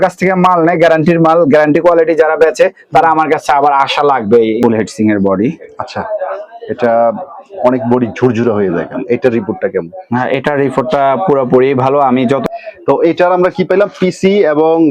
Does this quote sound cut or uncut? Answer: cut